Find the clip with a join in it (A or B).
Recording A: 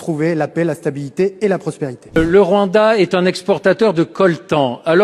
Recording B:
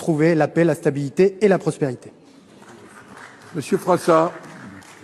A